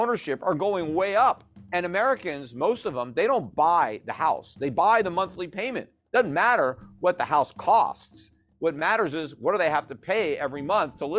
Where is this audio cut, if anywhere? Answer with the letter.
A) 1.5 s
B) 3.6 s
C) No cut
A